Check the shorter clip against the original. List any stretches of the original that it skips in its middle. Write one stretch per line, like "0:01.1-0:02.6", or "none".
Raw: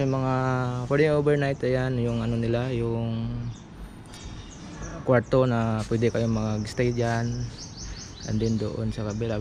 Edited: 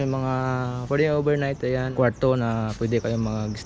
0:01.9-0:05.0